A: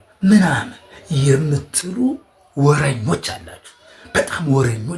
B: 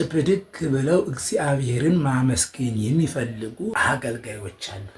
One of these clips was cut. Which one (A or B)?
B